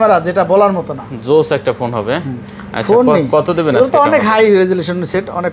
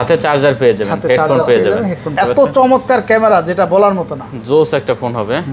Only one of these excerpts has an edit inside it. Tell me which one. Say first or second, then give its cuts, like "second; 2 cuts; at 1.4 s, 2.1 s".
second; 1 cut; at 2.1 s